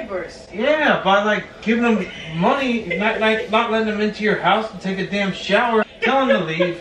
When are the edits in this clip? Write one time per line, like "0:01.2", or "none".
0:05.8